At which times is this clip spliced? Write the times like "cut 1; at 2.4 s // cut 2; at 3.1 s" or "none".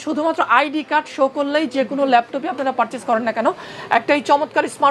none